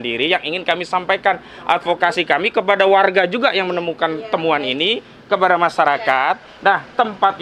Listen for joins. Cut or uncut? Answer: uncut